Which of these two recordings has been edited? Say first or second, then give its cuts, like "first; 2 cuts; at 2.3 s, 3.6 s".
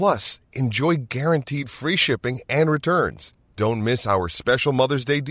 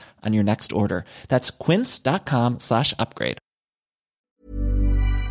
second; 1 cut; at 4.4 s